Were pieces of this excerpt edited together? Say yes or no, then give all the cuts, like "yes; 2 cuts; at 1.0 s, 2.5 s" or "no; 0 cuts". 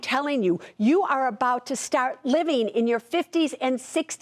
no; 0 cuts